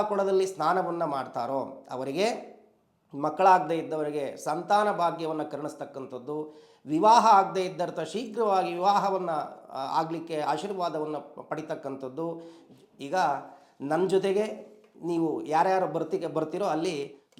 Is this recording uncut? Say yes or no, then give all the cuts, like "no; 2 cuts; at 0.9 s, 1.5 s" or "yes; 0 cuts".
no; 1 cut; at 12.6 s